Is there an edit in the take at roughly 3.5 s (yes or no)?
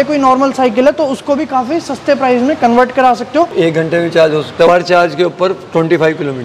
yes